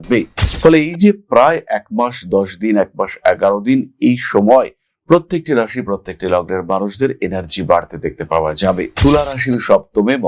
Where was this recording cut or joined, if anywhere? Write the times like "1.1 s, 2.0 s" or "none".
9.0 s